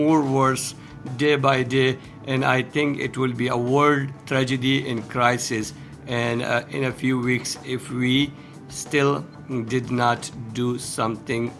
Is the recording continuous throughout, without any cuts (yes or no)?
yes